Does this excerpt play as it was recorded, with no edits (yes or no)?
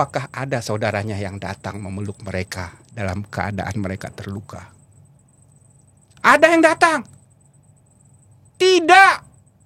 yes